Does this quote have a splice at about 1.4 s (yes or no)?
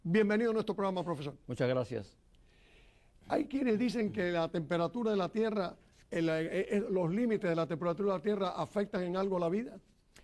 yes